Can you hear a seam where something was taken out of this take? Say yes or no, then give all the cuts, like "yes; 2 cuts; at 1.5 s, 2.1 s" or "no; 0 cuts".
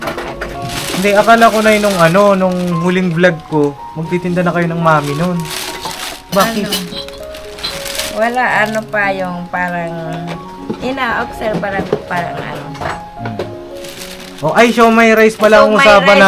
no; 0 cuts